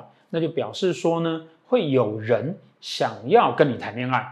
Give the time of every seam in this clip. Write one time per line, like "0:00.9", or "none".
none